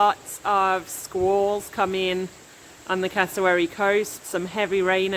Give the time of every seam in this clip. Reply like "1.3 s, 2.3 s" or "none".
none